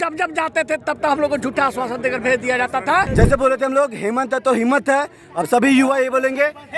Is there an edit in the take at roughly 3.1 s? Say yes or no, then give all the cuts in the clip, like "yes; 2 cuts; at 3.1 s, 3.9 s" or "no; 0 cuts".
yes; 1 cut; at 3.1 s